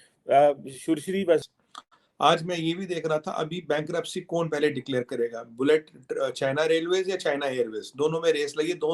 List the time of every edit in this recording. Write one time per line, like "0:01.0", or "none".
0:01.5